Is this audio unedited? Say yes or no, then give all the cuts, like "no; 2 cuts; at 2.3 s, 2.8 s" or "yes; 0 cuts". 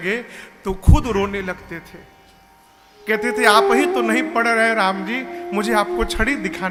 yes; 0 cuts